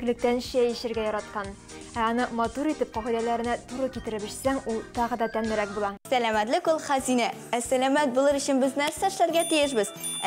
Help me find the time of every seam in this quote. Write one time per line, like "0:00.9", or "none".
0:06.0